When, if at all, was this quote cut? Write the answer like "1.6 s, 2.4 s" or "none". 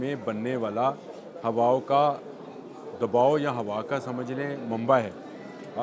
none

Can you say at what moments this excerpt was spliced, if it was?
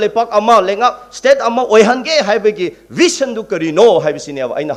none

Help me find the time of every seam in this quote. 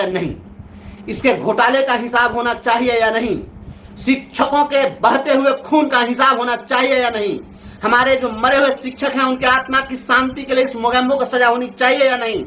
none

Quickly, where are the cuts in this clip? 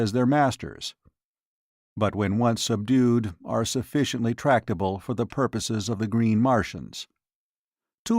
3.6 s

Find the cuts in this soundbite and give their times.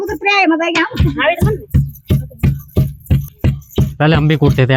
none

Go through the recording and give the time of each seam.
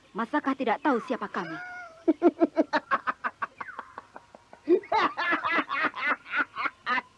none

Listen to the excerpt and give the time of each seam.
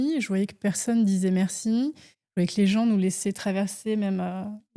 none

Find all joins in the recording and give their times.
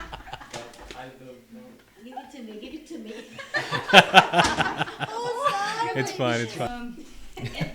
6.7 s

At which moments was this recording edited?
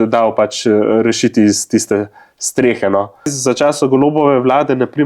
3.4 s

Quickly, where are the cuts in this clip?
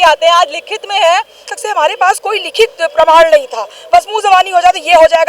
1.4 s

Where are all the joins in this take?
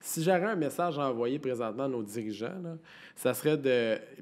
none

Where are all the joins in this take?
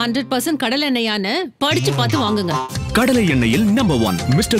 none

